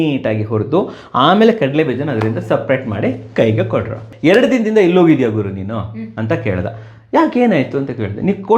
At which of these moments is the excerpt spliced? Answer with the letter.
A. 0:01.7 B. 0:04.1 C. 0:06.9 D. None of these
B